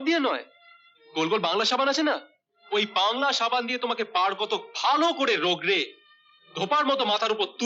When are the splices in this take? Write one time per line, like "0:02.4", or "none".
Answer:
none